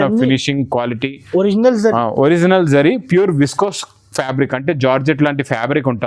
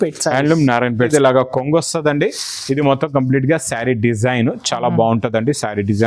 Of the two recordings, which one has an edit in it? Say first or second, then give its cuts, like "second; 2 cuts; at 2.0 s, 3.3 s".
second; 1 cut; at 1.1 s